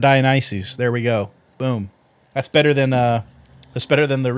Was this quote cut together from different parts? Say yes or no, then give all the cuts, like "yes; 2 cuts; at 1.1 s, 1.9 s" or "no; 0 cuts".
no; 0 cuts